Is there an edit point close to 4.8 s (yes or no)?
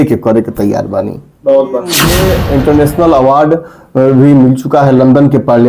no